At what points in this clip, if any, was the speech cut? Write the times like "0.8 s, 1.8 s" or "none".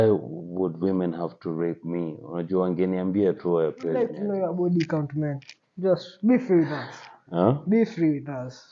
4.2 s